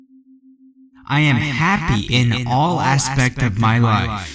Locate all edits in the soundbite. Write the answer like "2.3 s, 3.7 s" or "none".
1.0 s